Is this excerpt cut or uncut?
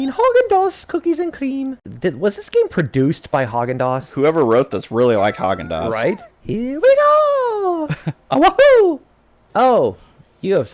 cut